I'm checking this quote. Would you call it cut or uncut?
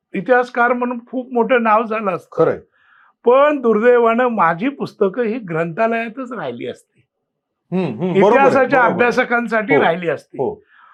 uncut